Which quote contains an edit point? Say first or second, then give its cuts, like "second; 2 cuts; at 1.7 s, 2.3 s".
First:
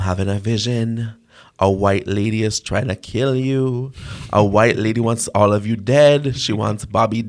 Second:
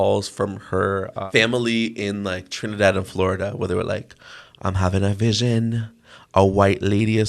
second; 1 cut; at 1.2 s